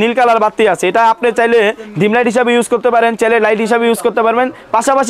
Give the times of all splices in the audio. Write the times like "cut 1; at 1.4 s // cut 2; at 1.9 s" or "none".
none